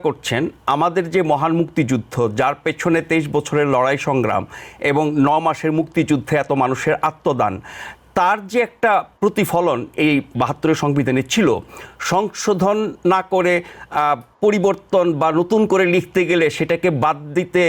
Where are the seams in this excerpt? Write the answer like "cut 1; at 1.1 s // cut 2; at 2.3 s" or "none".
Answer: none